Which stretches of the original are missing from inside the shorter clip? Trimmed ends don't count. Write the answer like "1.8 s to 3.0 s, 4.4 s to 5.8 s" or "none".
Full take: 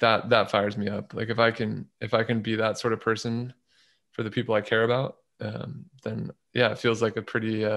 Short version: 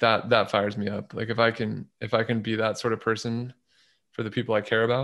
none